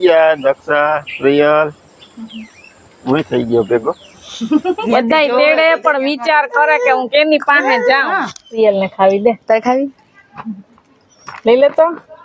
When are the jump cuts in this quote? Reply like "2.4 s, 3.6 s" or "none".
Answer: 4.8 s, 8.6 s